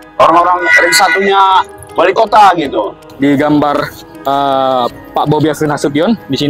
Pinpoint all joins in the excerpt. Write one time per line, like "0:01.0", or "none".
0:03.0